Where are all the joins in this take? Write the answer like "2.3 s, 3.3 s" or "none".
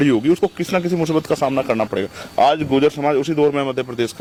none